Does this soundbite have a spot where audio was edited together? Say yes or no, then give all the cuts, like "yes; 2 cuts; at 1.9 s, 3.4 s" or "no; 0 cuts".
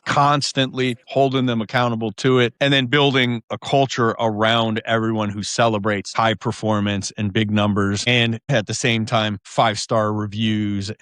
yes; 4 cuts; at 1.0 s, 2.5 s, 3.5 s, 8.4 s